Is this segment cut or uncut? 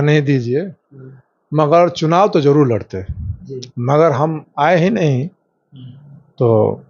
uncut